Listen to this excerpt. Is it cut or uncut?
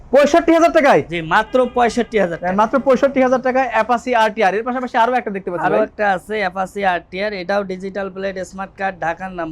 uncut